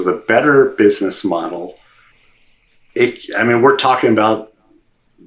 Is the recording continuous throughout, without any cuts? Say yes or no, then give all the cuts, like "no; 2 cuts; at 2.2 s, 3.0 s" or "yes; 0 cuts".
yes; 0 cuts